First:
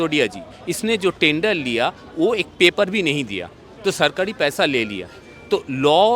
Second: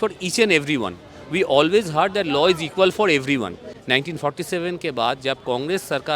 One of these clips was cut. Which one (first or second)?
second